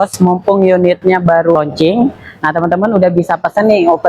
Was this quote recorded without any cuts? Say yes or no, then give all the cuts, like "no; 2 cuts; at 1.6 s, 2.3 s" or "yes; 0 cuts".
no; 1 cut; at 1.5 s